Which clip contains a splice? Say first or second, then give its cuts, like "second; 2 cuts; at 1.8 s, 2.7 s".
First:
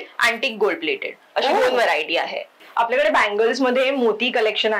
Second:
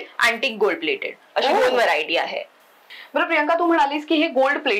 first; 1 cut; at 2.6 s